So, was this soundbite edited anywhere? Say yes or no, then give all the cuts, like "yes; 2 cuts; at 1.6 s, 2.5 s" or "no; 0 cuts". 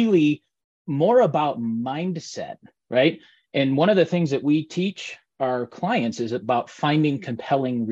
no; 0 cuts